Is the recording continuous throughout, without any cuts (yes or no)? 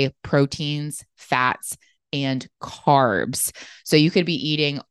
no